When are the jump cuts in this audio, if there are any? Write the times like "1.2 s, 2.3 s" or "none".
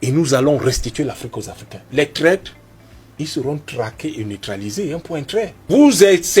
1.9 s, 5.6 s